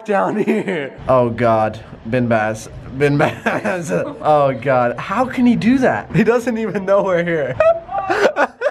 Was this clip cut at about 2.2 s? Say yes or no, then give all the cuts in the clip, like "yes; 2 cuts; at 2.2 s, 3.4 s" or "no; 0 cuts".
no; 3 cuts; at 0.9 s, 6.1 s, 7.5 s